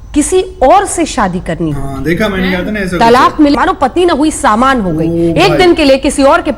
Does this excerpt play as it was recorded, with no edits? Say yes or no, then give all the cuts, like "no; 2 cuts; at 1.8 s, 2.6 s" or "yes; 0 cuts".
no; 1 cut; at 3.5 s